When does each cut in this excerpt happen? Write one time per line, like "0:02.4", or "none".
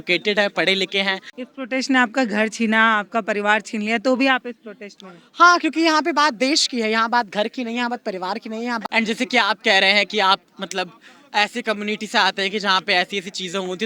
0:01.3
0:08.8